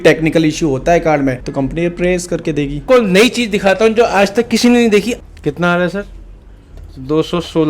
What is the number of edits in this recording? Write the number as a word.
two